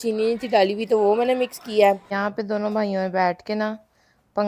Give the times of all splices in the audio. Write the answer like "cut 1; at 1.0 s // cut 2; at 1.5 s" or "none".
cut 1; at 2.2 s

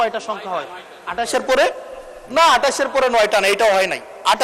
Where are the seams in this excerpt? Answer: none

